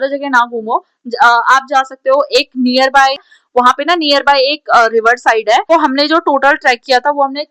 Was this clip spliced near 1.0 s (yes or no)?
no